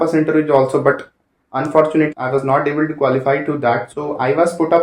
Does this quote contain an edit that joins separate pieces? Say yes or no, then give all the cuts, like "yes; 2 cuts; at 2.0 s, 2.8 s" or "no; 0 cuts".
yes; 2 cuts; at 2.1 s, 3.8 s